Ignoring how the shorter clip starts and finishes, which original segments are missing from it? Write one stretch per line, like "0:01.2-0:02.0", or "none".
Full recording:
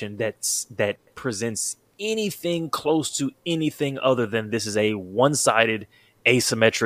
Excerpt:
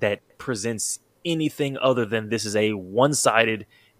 0:01.9-0:03.4